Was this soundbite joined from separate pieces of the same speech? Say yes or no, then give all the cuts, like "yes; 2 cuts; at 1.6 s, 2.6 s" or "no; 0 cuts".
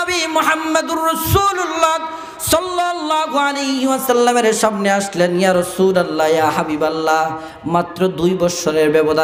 no; 0 cuts